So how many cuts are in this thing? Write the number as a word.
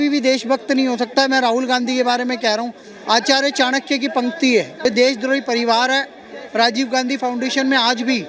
one